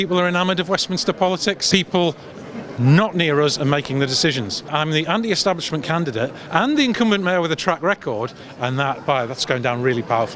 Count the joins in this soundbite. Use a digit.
2